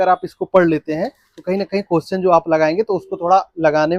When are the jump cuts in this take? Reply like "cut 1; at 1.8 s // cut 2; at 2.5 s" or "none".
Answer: none